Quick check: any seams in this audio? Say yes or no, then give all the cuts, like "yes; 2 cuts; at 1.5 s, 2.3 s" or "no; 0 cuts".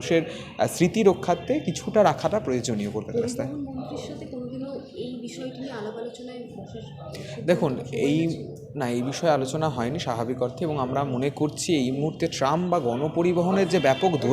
no; 0 cuts